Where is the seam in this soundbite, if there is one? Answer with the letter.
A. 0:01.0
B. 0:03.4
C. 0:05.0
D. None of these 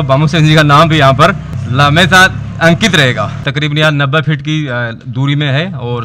D